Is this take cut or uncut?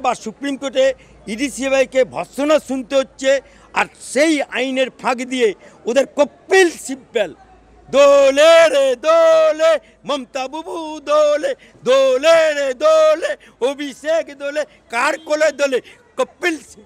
uncut